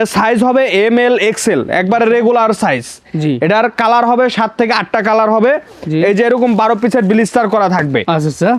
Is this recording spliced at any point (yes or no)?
no